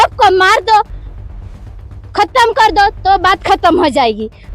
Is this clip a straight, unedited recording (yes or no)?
yes